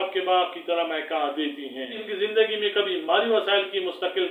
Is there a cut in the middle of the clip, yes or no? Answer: yes